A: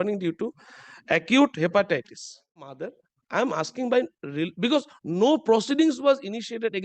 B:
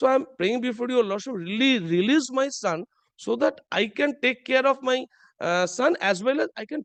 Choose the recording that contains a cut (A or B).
A